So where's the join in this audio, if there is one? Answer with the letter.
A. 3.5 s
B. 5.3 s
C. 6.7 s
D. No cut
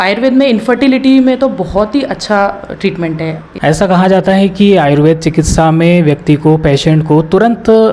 A